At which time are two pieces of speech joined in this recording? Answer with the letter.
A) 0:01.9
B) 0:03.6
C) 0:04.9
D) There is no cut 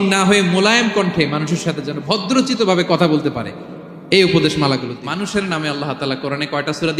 C